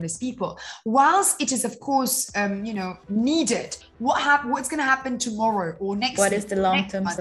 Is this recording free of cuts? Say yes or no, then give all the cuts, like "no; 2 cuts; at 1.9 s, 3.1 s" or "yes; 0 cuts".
no; 1 cut; at 3.8 s